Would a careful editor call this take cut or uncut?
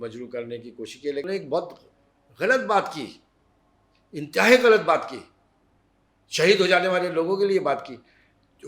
cut